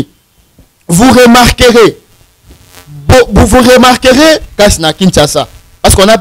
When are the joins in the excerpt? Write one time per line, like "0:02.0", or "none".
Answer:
0:04.5